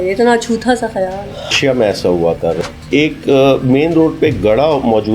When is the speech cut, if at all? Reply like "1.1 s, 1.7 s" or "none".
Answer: 1.5 s, 2.7 s